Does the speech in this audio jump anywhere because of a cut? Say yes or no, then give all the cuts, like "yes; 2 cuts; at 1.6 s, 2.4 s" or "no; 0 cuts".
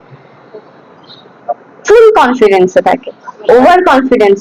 no; 0 cuts